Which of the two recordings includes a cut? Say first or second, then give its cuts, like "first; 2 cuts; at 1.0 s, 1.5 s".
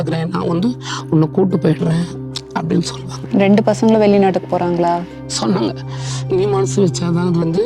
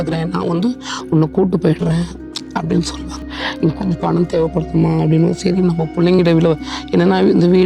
second; 1 cut; at 3.3 s